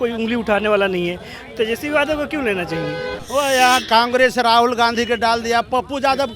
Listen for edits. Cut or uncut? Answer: cut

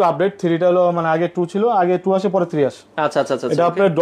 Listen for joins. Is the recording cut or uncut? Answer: uncut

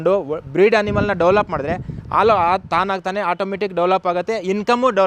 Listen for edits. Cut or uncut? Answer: uncut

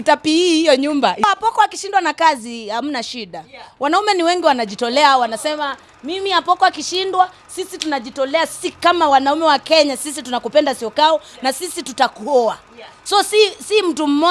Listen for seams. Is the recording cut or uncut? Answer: cut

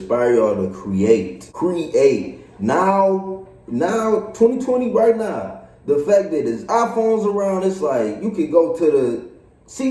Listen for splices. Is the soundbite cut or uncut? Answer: cut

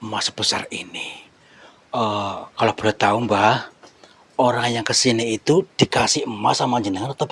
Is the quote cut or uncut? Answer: uncut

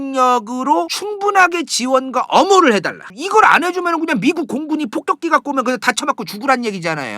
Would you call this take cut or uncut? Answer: cut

